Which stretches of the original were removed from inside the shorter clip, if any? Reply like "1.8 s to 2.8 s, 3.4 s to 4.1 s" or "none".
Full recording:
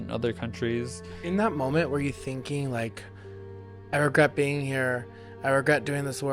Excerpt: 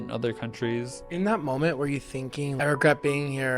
1.0 s to 1.1 s, 2.7 s to 3.9 s